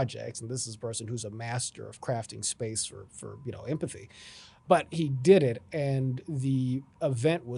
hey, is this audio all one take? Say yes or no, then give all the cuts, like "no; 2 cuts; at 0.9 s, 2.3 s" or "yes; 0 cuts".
no; 1 cut; at 4.5 s